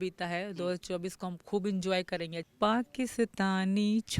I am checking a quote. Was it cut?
yes; 1 cut; at 2.4 s

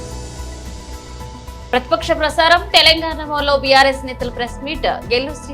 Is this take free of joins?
no; 1 cut; at 1.4 s

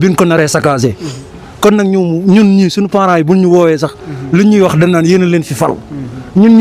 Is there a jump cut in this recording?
no; 0 cuts

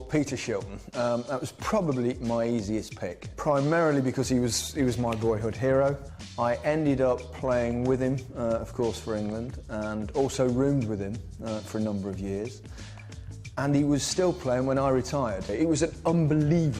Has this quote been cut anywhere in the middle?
yes; 1 cut; at 11.3 s

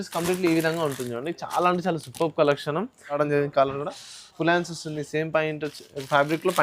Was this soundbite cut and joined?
yes; 1 cut; at 3.2 s

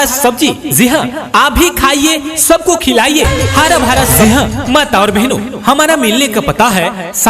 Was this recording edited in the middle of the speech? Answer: yes; 1 cut; at 4.1 s

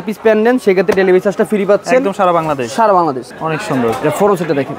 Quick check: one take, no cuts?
no; 1 cut; at 3.3 s

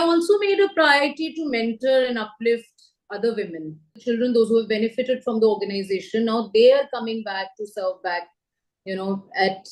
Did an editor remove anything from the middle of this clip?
yes; 1 cut; at 4.0 s

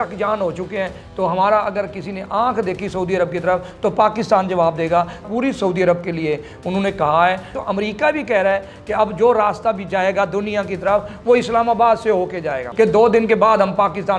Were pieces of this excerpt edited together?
yes; 3 cuts; at 5.2 s, 7.6 s, 12.6 s

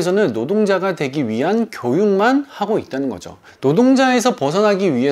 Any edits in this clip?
no; 0 cuts

